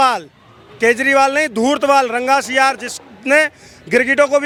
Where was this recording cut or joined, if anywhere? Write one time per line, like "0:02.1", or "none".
none